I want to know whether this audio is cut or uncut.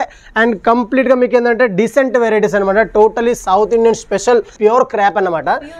cut